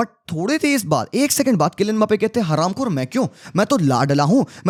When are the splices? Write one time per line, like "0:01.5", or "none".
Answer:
none